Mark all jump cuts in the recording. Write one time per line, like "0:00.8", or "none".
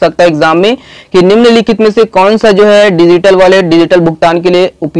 none